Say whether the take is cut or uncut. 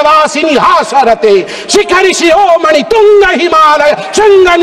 uncut